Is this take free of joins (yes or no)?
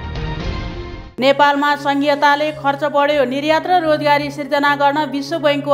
yes